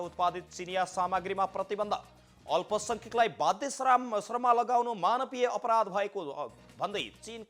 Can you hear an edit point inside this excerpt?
no; 0 cuts

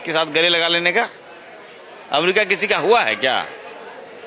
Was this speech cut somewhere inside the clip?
no; 0 cuts

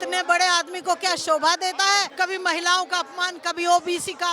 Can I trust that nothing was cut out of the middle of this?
no; 1 cut; at 2.1 s

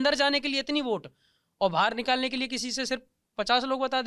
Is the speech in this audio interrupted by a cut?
no; 0 cuts

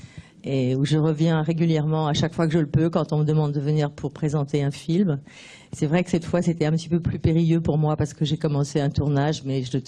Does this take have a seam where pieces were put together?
yes; 1 cut; at 2.7 s

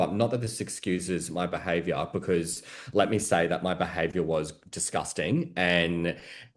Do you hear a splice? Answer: no; 0 cuts

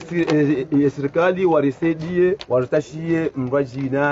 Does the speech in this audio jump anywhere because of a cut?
no; 0 cuts

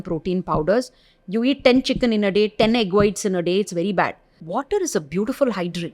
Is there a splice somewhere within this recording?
yes; 1 cut; at 4.4 s

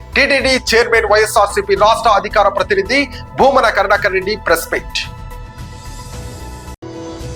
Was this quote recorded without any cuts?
yes; 0 cuts

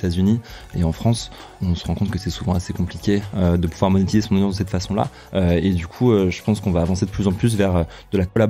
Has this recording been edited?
yes; 1 cut; at 5.2 s

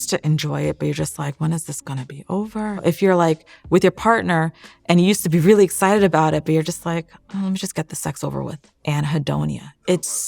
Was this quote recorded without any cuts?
no; 2 cuts; at 2.8 s, 8.7 s

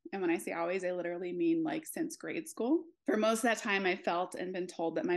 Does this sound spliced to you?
yes; 1 cut; at 2.9 s

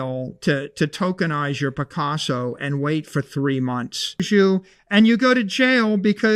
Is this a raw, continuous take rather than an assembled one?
no; 1 cut; at 4.2 s

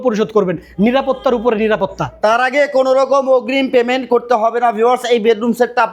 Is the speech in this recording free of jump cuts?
yes; 0 cuts

